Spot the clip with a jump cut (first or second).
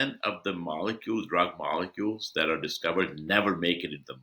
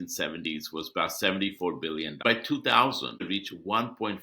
second